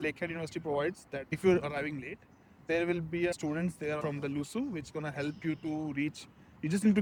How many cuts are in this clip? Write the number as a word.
zero